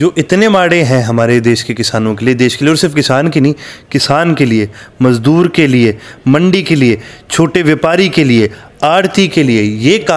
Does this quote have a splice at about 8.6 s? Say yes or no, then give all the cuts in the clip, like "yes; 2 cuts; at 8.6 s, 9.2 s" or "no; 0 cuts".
no; 0 cuts